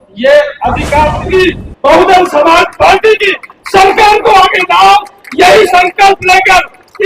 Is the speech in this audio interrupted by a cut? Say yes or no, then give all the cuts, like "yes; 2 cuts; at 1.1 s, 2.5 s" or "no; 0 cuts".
yes; 1 cut; at 1.2 s